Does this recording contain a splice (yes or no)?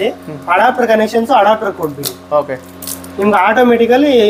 no